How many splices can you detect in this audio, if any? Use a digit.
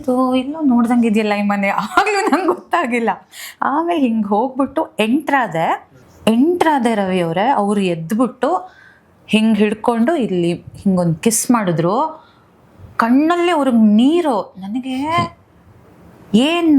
1